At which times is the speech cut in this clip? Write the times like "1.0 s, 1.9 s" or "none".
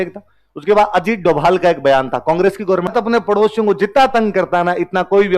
2.9 s